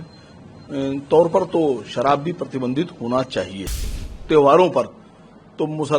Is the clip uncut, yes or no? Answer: no